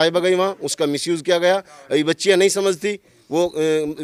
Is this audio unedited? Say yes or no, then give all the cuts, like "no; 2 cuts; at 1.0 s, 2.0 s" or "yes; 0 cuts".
yes; 0 cuts